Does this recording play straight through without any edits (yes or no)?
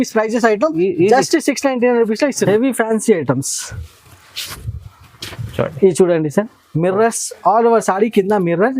no